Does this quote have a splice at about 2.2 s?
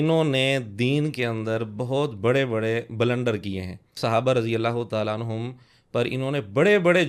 no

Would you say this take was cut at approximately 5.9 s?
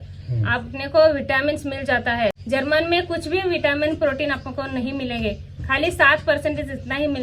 no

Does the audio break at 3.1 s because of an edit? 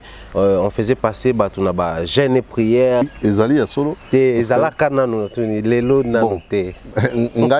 yes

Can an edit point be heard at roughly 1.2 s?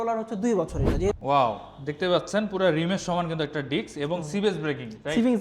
yes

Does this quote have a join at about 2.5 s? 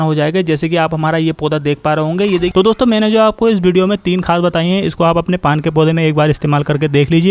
yes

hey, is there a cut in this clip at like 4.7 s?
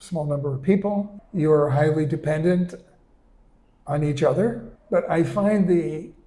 yes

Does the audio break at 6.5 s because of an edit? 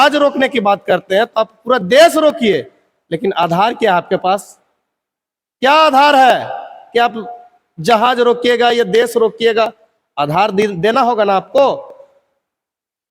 no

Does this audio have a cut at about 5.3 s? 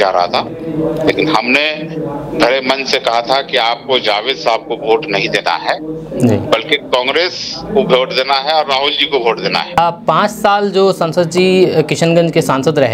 no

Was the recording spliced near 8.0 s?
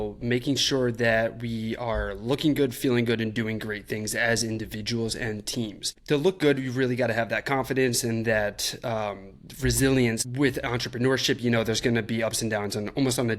no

